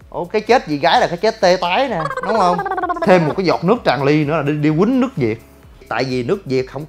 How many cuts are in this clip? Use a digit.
2